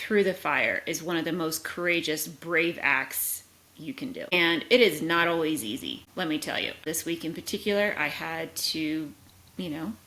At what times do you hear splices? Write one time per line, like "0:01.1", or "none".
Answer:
0:04.3
0:06.0
0:06.8